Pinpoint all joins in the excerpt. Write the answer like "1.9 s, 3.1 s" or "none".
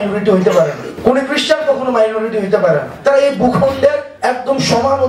0.9 s, 2.9 s, 4.1 s